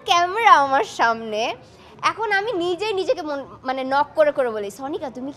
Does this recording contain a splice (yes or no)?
no